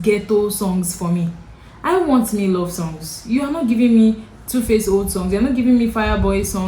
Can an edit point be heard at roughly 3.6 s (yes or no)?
no